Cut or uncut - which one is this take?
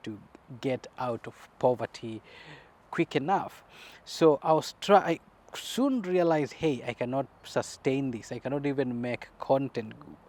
uncut